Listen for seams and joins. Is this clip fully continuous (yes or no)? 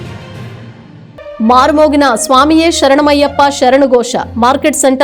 no